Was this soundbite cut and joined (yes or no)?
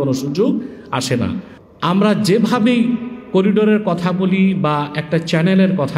yes